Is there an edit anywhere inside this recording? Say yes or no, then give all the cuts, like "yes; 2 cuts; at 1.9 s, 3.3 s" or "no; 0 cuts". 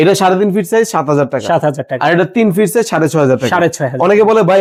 no; 0 cuts